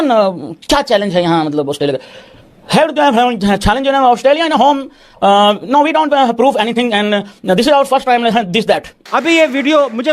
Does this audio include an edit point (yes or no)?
yes